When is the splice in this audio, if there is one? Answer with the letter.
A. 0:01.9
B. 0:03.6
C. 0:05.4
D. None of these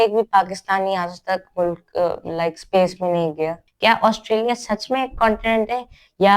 B